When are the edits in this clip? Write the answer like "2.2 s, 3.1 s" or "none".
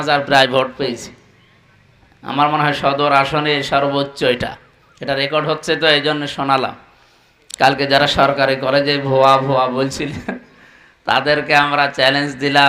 none